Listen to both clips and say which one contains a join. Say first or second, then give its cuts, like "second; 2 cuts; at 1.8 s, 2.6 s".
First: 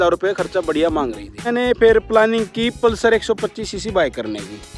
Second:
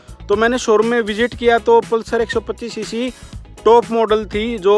first; 1 cut; at 1.5 s